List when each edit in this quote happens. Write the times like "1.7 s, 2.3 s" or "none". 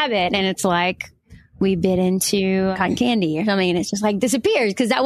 2.7 s